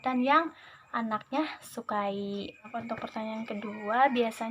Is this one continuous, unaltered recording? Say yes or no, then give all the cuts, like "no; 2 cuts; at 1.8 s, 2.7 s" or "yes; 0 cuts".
no; 1 cut; at 2.7 s